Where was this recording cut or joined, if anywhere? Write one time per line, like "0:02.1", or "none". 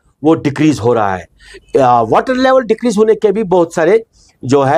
none